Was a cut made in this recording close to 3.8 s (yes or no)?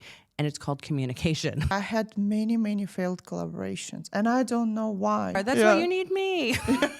no